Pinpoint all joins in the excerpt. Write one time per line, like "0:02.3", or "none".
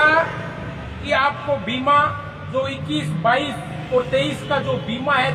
none